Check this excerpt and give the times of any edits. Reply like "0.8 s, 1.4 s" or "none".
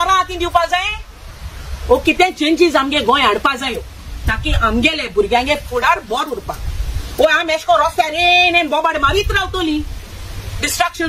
none